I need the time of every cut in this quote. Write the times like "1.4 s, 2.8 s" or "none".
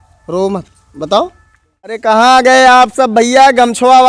2.0 s